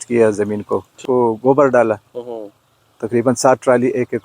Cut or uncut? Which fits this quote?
cut